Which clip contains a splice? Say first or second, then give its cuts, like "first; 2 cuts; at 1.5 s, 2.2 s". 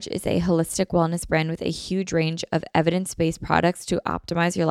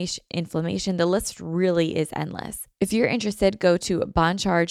second; 1 cut; at 2.6 s